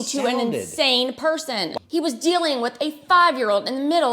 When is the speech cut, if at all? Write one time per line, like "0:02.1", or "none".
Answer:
0:01.7

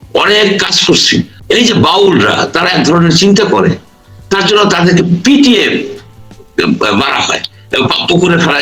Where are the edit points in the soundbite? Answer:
0:01.3

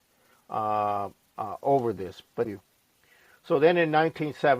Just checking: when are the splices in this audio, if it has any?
0:02.5

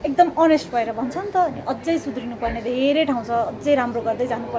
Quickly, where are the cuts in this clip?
none

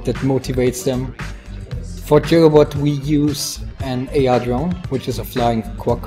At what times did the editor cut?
0:03.1

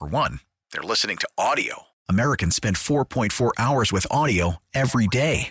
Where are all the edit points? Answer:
none

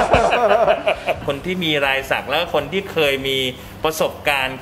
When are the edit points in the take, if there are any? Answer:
0:01.2

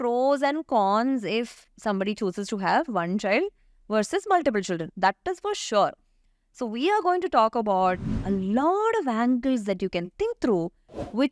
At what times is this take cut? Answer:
none

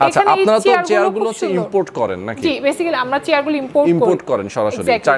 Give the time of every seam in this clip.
none

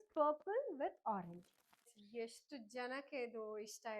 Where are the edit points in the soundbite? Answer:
0:01.9

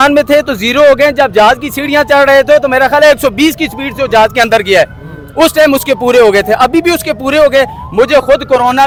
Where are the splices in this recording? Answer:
none

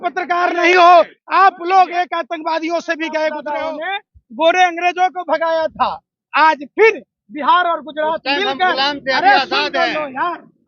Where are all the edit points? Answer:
0:03.5

